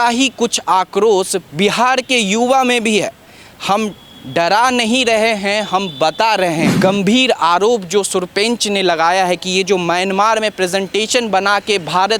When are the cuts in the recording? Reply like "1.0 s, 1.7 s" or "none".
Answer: 6.7 s